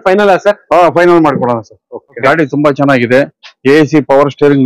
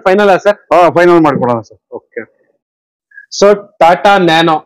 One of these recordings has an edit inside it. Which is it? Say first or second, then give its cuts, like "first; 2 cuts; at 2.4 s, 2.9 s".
first; 1 cut; at 2.2 s